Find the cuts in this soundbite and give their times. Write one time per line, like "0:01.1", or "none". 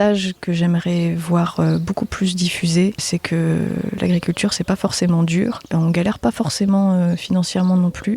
0:03.0